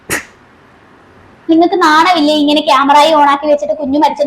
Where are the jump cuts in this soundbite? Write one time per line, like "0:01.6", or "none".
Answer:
0:01.5